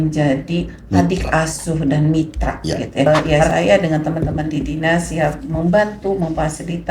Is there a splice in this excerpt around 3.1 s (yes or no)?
yes